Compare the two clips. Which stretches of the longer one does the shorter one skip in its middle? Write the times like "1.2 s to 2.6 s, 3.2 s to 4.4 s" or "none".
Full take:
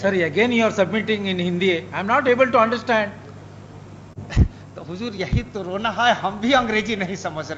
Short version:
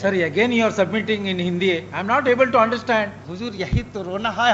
3.2 s to 4.8 s